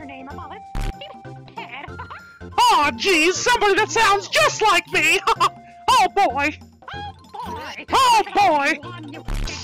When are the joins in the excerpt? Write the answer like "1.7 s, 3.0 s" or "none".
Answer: none